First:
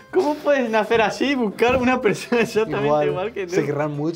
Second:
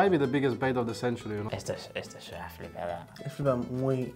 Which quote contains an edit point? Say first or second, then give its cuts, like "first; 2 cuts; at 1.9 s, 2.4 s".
second; 1 cut; at 1.3 s